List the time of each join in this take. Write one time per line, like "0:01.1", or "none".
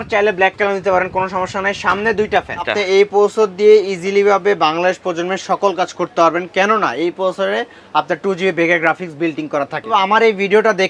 0:02.7
0:09.9